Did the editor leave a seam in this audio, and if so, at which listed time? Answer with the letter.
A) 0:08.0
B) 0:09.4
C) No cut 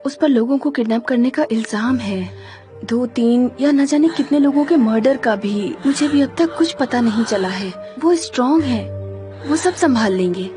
C